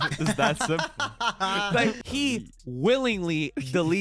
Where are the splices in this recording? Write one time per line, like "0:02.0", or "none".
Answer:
0:02.0